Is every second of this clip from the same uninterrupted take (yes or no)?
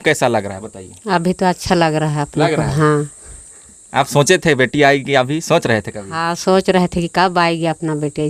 yes